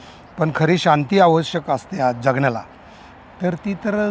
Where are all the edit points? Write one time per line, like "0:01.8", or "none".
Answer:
none